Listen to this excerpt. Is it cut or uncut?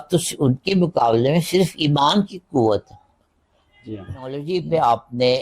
cut